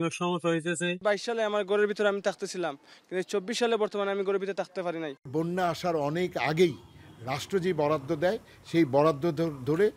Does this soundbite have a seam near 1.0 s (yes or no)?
yes